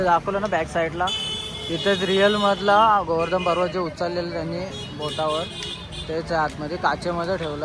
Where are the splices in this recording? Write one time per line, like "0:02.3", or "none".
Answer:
none